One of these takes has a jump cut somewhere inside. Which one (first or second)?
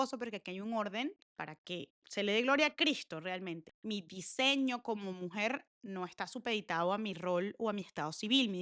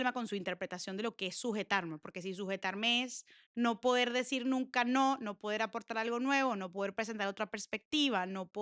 first